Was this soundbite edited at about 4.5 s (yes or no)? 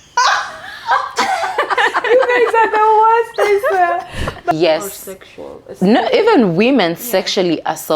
yes